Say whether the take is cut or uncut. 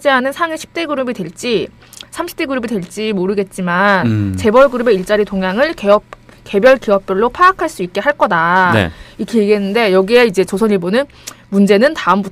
cut